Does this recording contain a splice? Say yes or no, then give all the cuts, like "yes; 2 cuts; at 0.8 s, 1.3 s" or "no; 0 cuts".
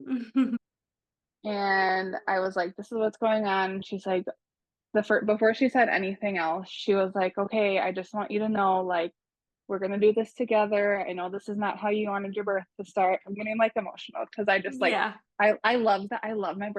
no; 0 cuts